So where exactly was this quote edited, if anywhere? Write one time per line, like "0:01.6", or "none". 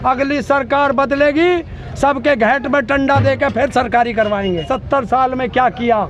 0:04.7